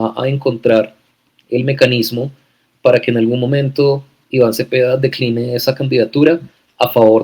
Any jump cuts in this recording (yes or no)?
no